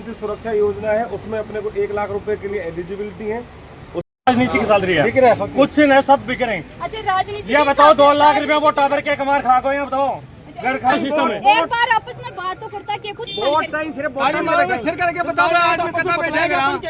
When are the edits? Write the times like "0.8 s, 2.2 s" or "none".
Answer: 4.1 s, 10.9 s